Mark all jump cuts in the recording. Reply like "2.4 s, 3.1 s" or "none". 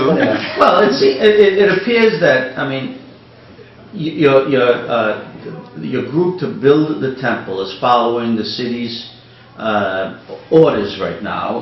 none